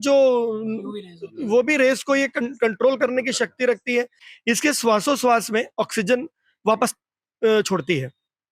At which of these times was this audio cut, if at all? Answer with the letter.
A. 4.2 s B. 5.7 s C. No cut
A